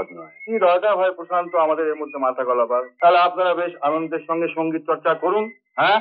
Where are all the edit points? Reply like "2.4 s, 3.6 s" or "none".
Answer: 2.9 s